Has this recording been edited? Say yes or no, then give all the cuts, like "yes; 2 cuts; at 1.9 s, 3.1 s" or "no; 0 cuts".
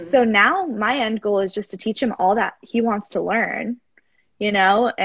no; 0 cuts